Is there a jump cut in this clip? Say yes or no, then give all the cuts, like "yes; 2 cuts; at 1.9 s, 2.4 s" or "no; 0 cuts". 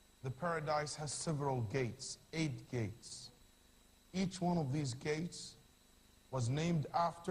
yes; 1 cut; at 1.5 s